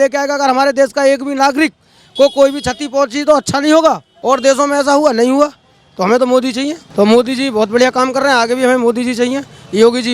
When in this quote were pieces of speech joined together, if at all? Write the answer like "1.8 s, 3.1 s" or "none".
4.1 s, 6.8 s